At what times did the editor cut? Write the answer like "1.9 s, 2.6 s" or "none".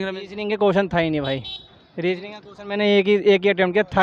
none

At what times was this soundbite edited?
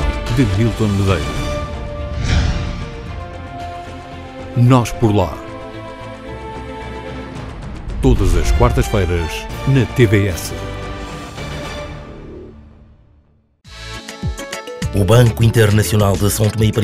13.5 s

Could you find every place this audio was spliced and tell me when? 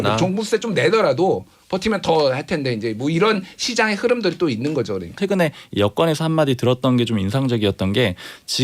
5.2 s

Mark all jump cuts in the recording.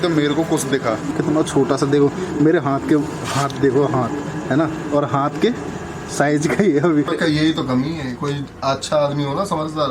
1.1 s, 7.1 s

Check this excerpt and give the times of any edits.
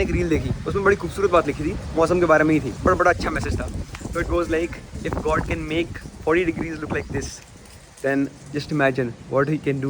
none

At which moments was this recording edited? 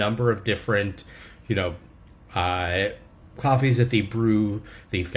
none

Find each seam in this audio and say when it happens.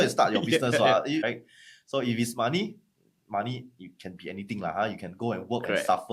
1.2 s

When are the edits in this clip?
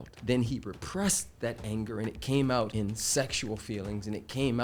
2.7 s

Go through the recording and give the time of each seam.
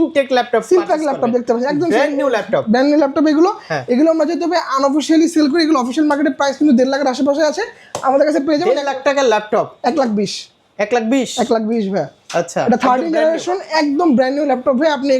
none

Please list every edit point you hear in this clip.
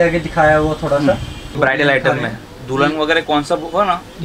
1.6 s

